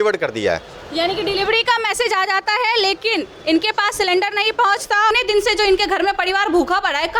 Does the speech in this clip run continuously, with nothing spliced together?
no; 1 cut; at 5.1 s

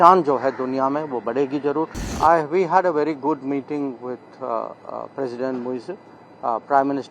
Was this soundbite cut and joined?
yes; 1 cut; at 2.1 s

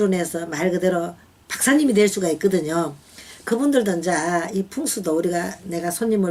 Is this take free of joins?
yes; 0 cuts

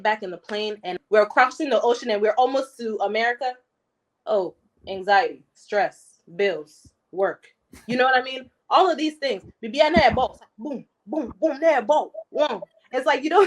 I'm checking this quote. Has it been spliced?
yes; 1 cut; at 1.0 s

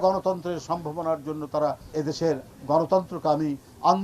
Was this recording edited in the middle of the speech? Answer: yes; 1 cut; at 1.8 s

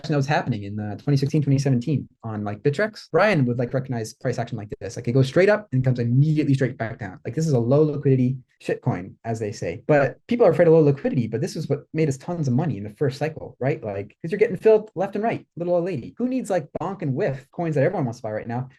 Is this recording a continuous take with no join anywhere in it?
yes; 0 cuts

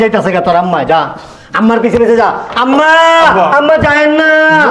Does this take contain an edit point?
no; 0 cuts

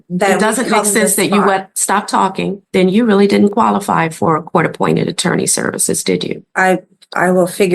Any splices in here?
yes; 2 cuts; at 2.6 s, 6.5 s

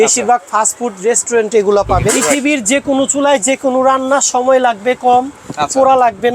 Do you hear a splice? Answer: yes; 1 cut; at 2.3 s

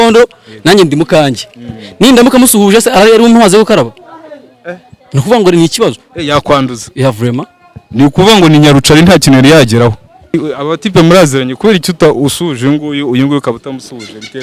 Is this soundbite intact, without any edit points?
no; 1 cut; at 10.3 s

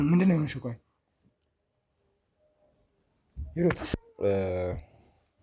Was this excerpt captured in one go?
no; 1 cut; at 4.0 s

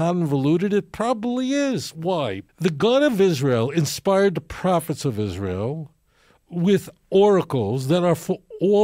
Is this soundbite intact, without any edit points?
no; 1 cut; at 2.5 s

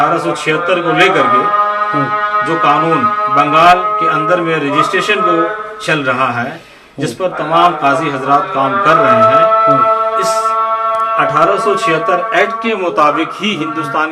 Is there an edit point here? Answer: no; 0 cuts

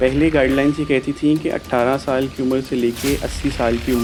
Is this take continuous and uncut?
yes; 0 cuts

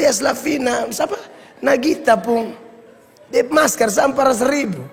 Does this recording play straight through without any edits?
yes; 0 cuts

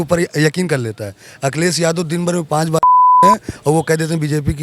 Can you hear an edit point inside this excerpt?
no; 0 cuts

